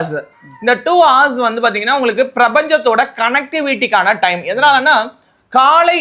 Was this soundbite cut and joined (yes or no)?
no